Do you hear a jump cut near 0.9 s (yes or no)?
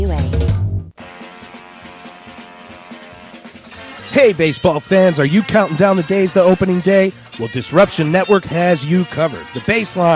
yes